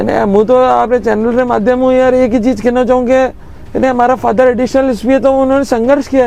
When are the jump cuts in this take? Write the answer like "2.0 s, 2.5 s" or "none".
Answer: none